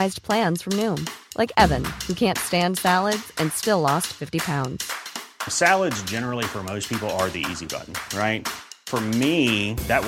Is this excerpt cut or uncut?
uncut